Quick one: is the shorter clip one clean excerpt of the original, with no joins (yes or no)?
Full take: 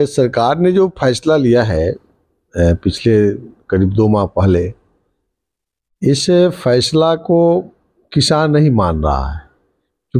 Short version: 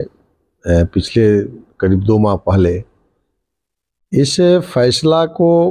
yes